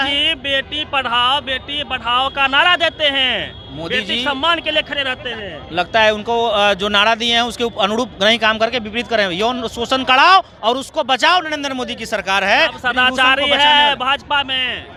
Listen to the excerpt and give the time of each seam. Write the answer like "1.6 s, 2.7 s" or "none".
none